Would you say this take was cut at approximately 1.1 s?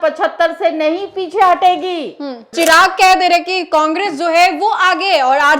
no; 1 cut; at 2.5 s

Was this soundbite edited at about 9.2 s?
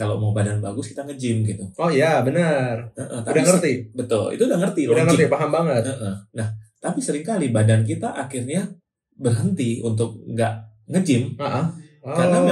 no; 0 cuts

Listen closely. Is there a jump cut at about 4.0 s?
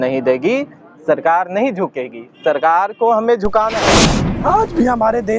yes; 1 cut; at 4.0 s

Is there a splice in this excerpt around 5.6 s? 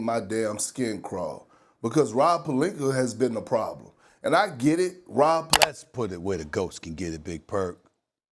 yes; 1 cut; at 5.6 s

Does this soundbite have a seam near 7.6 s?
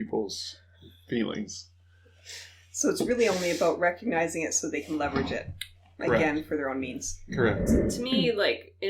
yes; 1 cut; at 7.6 s

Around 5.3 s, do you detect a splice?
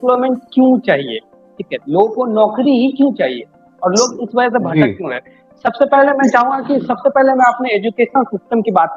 no; 0 cuts

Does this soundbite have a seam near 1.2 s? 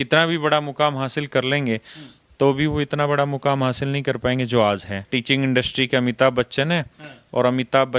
no; 1 cut; at 5.1 s

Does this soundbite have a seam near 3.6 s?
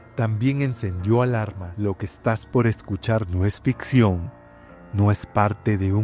no; 1 cut; at 1.6 s

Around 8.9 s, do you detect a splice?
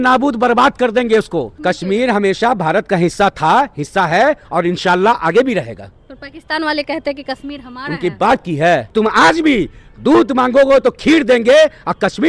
yes; 2 cuts; at 1.5 s, 8.9 s

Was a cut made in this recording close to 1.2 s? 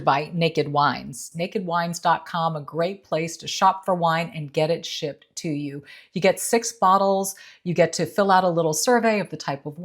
yes; 1 cut; at 1.2 s

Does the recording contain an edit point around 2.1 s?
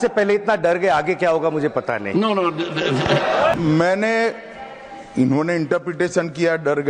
no; 1 cut; at 3.5 s

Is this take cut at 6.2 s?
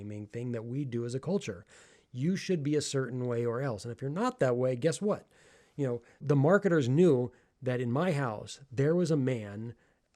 yes; 1 cut; at 6.2 s

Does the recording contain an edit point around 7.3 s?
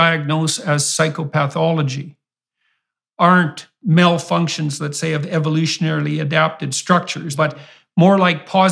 yes; 1 cut; at 7.3 s

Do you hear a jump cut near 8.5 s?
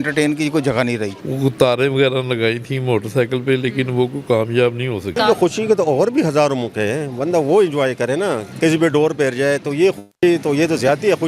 yes; 3 cuts; at 1.2 s, 5.2 s, 8.5 s

